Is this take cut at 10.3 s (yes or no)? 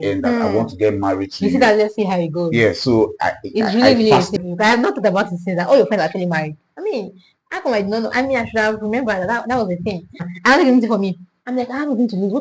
yes